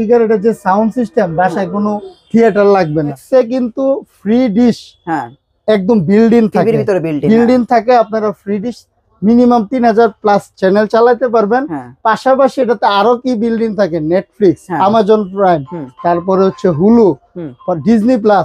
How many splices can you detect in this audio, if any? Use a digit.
1